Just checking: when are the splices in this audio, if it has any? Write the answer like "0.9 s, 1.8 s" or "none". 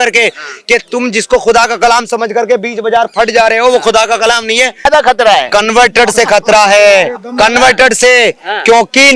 4.8 s